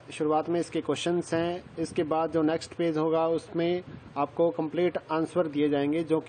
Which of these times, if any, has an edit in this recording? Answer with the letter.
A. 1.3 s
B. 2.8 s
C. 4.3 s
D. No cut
A